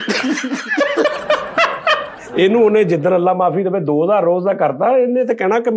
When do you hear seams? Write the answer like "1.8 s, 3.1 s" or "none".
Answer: 2.1 s